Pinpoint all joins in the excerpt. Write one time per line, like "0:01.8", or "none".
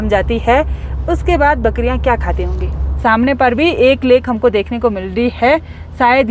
0:02.8